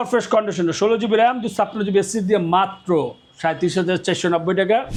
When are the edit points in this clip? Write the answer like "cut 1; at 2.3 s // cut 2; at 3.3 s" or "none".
none